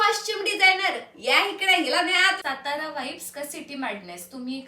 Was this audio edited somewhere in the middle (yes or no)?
yes